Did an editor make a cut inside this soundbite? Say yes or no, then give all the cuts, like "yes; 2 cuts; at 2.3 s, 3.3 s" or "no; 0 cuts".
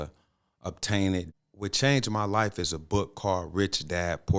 yes; 1 cut; at 1.3 s